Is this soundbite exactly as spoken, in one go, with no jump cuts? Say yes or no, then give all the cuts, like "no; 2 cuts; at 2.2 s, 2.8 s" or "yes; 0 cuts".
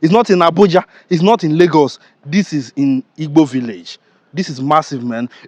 yes; 0 cuts